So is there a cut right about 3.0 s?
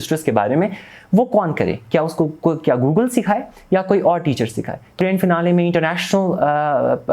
no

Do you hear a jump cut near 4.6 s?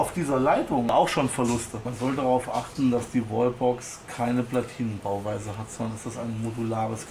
no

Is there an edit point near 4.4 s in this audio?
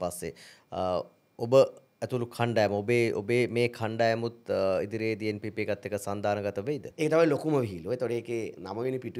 no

